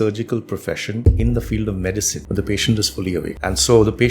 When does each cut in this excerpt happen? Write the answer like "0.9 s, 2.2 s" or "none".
1.0 s, 2.2 s, 3.3 s